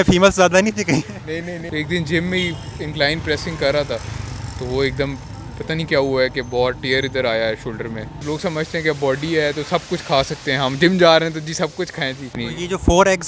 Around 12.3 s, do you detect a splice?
yes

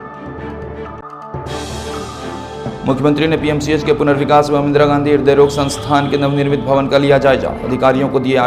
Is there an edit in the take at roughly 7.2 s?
no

